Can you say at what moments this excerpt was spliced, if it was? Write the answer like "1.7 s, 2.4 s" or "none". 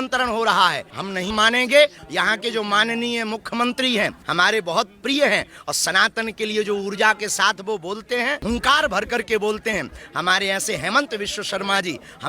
2.0 s, 8.4 s